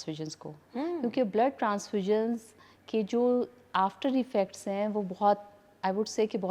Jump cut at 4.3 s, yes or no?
no